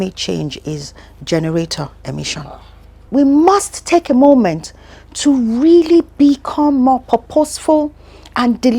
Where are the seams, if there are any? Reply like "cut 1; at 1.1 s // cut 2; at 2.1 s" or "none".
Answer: cut 1; at 3.1 s